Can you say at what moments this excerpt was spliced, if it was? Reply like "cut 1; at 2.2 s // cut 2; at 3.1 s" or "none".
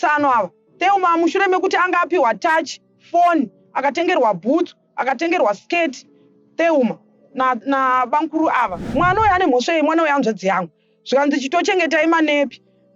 cut 1; at 8.8 s